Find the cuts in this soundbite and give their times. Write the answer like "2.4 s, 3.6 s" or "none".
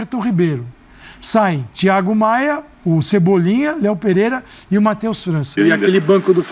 5.6 s